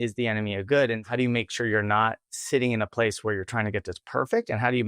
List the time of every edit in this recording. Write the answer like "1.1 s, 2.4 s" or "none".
1.0 s

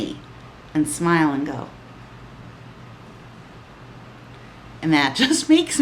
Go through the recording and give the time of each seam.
none

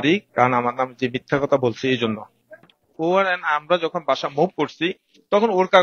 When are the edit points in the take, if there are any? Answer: 2.8 s

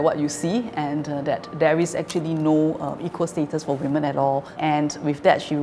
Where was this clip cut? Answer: none

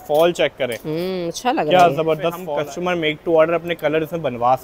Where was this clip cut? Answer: 2.4 s

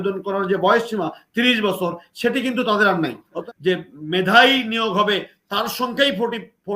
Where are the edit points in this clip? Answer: 3.4 s

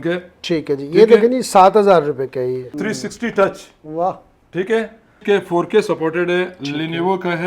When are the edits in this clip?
2.7 s, 5.2 s

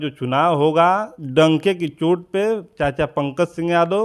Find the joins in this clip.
1.2 s

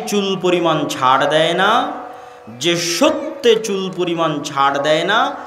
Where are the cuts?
none

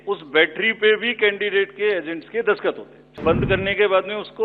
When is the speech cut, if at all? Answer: 3.4 s

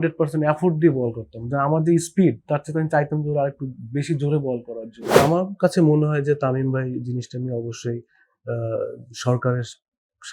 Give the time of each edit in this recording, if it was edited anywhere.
5.2 s

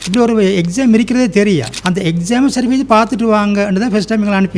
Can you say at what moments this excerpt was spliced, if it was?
1.7 s

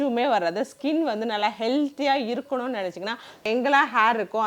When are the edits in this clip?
3.4 s

